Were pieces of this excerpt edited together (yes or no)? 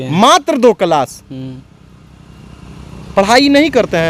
no